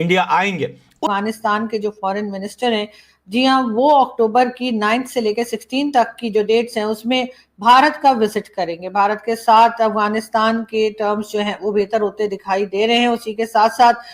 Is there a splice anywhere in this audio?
yes; 1 cut; at 1.1 s

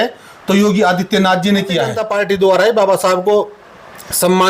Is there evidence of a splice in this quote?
yes; 1 cut; at 2.0 s

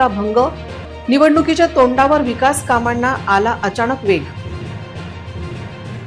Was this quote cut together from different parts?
no; 0 cuts

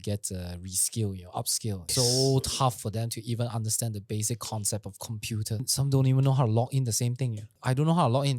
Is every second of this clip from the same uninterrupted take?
no; 3 cuts; at 1.9 s, 5.6 s, 7.5 s

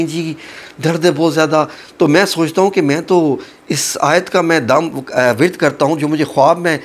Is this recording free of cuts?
yes; 0 cuts

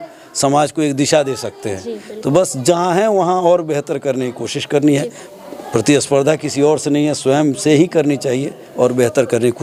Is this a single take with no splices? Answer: yes; 0 cuts

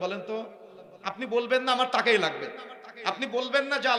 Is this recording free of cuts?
yes; 0 cuts

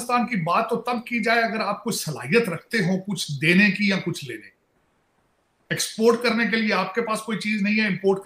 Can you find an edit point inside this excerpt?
no; 0 cuts

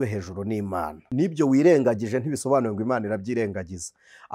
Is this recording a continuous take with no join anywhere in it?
no; 1 cut; at 1.0 s

